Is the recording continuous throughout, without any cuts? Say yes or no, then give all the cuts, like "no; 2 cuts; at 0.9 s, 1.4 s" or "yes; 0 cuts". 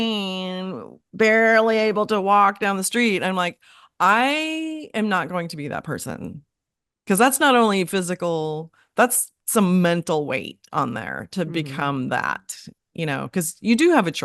yes; 0 cuts